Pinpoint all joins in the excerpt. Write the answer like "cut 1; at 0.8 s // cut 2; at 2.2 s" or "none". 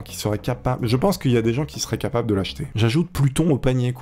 cut 1; at 2.7 s

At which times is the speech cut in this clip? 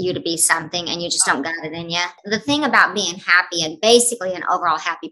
cut 1; at 2.2 s

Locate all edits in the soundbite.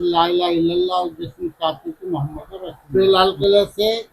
cut 1; at 2.8 s

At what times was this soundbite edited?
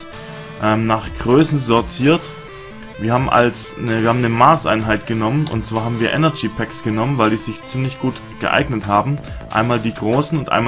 cut 1; at 1.4 s

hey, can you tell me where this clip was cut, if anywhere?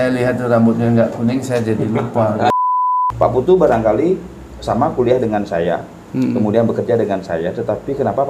cut 1; at 2.6 s

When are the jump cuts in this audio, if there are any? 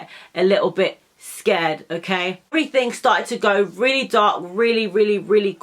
cut 1; at 2.5 s

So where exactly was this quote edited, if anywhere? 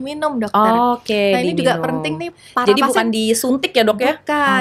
none

